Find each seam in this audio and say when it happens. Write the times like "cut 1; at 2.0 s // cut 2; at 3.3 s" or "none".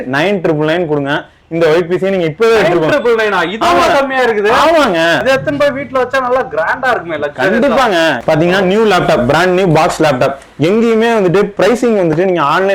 cut 1; at 5.2 s // cut 2; at 8.2 s